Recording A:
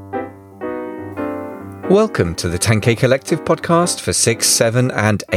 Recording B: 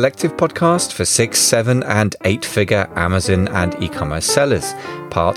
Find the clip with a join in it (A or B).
A